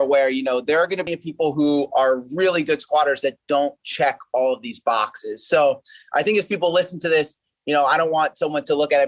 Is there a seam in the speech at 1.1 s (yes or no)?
yes